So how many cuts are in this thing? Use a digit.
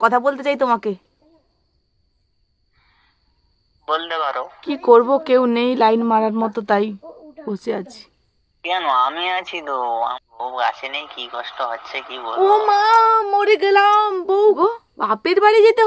3